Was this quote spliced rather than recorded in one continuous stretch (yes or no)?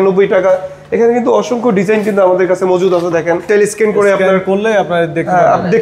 yes